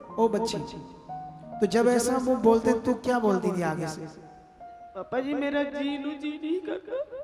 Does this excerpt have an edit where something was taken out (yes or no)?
no